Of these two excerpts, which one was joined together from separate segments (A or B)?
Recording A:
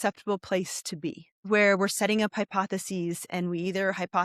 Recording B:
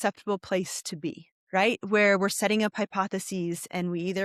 A